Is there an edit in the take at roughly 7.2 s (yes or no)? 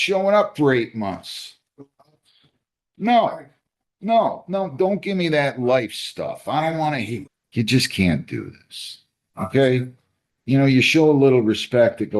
yes